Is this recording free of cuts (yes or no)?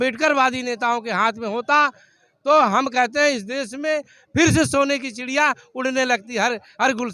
yes